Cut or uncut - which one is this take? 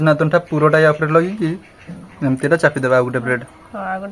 uncut